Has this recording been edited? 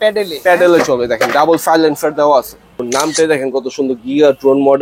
yes; 1 cut; at 3.1 s

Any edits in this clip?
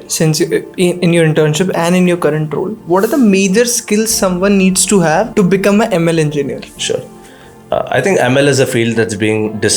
no; 0 cuts

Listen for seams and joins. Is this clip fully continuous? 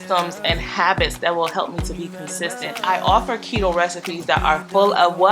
no; 1 cut; at 2.8 s

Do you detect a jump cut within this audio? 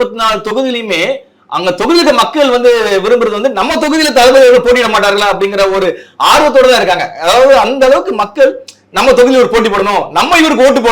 no; 0 cuts

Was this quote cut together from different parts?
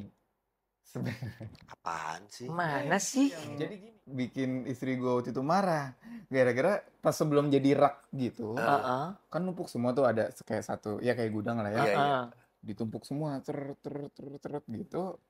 yes; 1 cut; at 3.6 s

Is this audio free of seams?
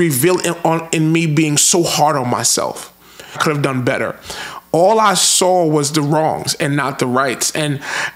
no; 1 cut; at 3.4 s

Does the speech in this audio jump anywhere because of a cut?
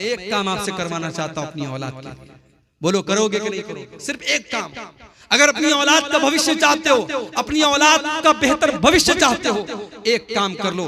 no; 0 cuts

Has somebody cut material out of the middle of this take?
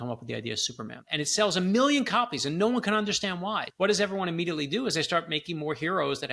yes; 2 cuts; at 1.0 s, 3.7 s

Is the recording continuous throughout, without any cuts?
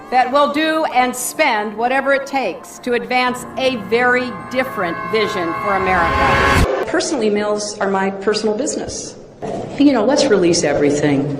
no; 1 cut; at 6.6 s

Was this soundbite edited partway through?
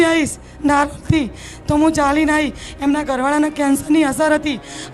no; 0 cuts

